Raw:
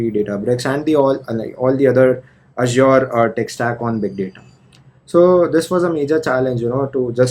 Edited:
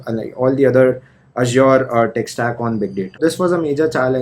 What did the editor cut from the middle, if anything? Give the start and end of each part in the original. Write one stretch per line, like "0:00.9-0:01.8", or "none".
0:04.4-0:05.5

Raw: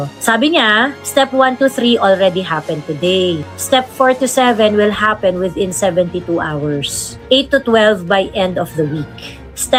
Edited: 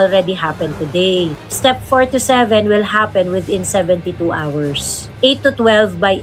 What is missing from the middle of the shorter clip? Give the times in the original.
none

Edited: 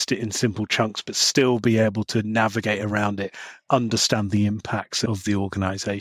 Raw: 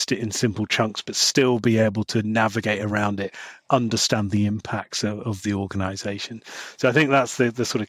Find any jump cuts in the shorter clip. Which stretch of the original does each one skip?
0:05.1-0:05.2

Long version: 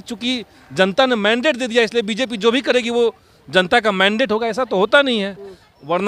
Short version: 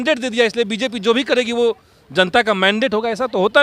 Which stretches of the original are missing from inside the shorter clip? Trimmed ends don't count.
none

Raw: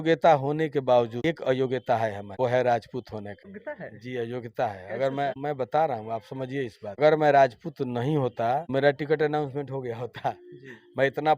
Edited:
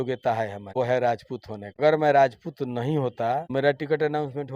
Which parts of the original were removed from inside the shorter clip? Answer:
0:03.3-0:06.8

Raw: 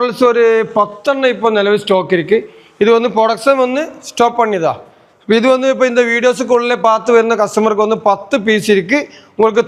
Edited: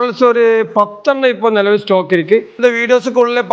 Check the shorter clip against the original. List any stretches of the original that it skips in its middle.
0:02.6-0:05.9

